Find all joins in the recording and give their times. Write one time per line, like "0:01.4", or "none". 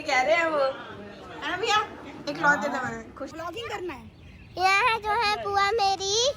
0:03.3